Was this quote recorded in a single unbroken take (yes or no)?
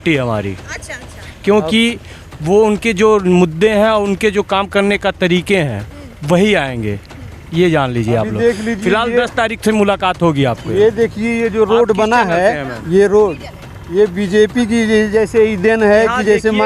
yes